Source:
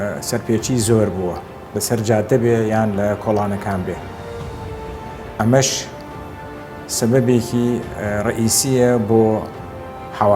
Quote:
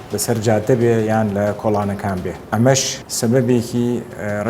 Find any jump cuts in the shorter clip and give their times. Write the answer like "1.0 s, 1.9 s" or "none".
2.4 s, 3.0 s